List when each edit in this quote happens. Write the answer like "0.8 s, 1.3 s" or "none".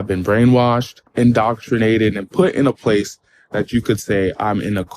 1.0 s